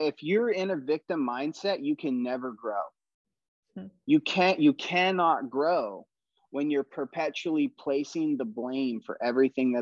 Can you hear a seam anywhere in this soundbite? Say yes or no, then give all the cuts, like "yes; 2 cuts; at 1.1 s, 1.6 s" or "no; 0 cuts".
no; 0 cuts